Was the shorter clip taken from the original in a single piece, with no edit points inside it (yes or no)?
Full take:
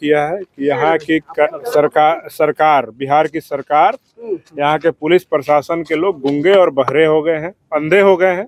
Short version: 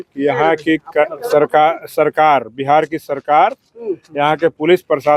yes